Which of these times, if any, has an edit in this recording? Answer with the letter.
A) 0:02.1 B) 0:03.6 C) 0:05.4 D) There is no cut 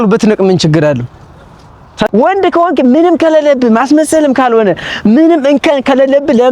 A